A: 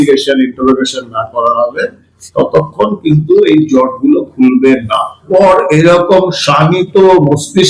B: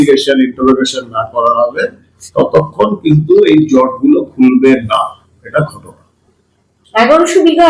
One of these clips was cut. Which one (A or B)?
A